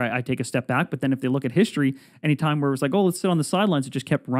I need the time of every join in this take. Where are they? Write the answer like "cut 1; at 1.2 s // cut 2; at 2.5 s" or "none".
none